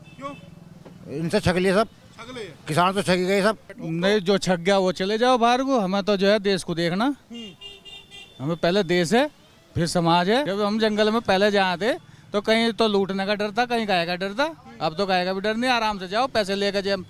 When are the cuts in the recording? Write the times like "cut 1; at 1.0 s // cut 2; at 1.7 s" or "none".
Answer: cut 1; at 3.7 s // cut 2; at 10.5 s